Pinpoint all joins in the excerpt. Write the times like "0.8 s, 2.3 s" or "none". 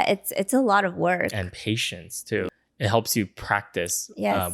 2.5 s